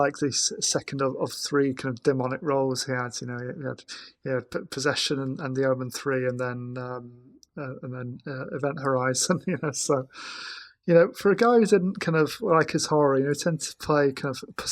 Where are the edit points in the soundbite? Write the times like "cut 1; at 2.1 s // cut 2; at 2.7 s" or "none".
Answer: none